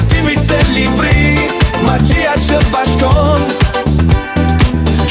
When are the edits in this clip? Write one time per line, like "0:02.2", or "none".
none